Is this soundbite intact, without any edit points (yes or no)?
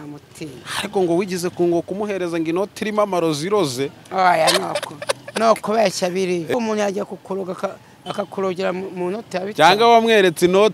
no